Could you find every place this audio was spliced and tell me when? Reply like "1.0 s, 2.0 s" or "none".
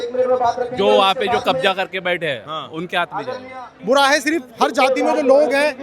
3.7 s

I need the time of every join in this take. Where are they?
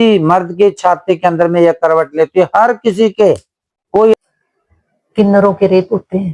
4.1 s

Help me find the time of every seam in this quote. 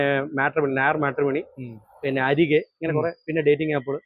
none

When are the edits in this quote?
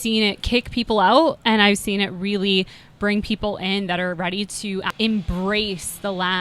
4.9 s

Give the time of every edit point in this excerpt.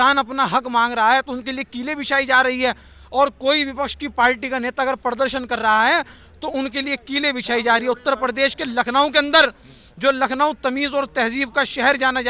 none

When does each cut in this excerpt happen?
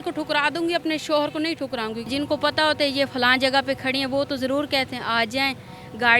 2.1 s

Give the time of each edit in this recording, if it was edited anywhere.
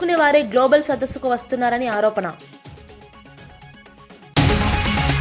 2.3 s, 4.2 s

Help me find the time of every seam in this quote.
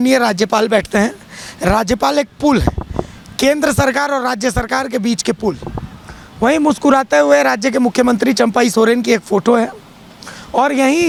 none

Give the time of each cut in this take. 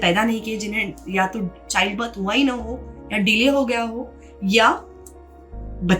none

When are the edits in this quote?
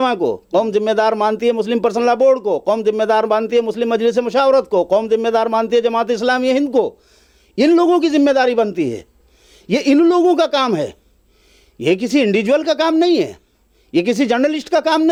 none

